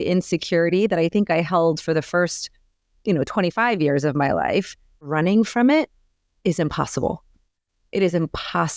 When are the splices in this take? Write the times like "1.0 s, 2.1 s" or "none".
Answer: 5.1 s